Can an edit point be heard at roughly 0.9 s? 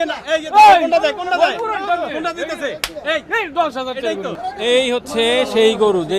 no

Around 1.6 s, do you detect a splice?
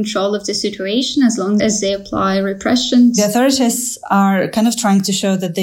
yes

